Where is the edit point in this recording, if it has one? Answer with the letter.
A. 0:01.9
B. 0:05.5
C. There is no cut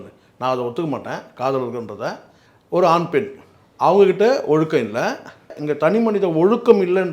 B